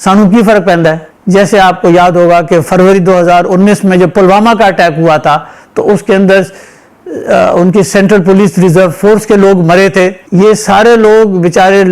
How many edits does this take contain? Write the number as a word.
two